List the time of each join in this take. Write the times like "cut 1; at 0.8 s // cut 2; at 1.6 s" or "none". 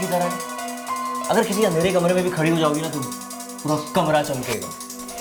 none